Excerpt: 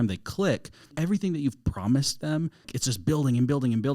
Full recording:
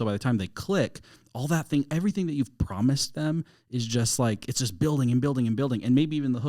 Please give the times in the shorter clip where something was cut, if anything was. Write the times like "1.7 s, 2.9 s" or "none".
0.9 s, 2.7 s